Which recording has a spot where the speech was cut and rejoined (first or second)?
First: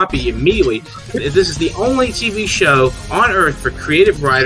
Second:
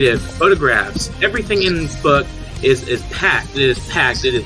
first